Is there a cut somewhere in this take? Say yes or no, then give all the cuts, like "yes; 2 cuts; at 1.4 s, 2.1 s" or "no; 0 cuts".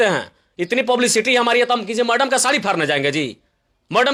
no; 0 cuts